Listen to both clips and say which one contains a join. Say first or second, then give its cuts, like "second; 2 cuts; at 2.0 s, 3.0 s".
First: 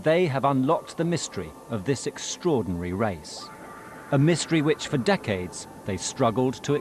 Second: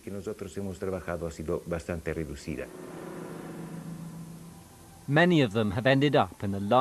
second; 1 cut; at 5.7 s